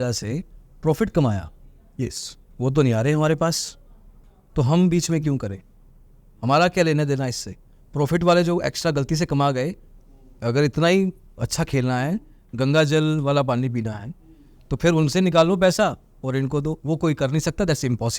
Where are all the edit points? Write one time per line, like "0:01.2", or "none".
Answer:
none

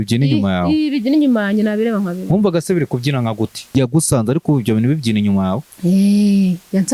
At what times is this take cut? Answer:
0:03.7

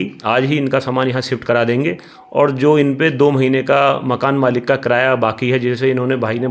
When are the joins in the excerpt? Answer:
none

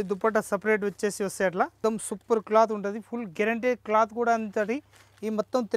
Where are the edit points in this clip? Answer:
0:01.8

